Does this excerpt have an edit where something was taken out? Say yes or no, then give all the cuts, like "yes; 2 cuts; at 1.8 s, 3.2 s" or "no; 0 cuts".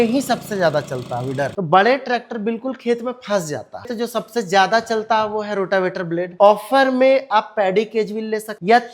yes; 3 cuts; at 1.5 s, 3.9 s, 6.3 s